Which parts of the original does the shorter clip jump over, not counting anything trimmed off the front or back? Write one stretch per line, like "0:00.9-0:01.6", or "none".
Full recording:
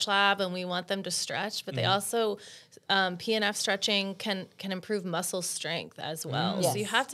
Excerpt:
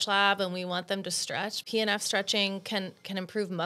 0:01.6-0:03.2